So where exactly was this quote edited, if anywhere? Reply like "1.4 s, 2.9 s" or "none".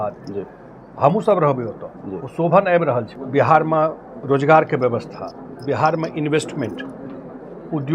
3.2 s